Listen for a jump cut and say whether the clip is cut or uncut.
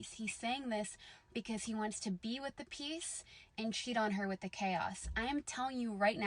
cut